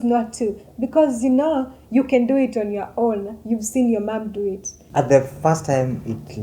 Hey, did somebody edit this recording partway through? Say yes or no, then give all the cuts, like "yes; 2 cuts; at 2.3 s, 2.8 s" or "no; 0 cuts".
yes; 1 cut; at 4.7 s